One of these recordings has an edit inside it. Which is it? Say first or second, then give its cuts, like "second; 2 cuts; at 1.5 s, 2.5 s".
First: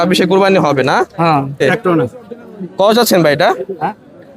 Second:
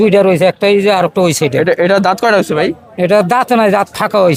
first; 1 cut; at 1.6 s